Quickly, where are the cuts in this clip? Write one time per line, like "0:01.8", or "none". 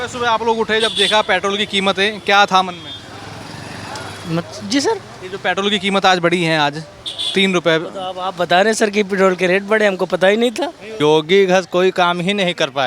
0:10.9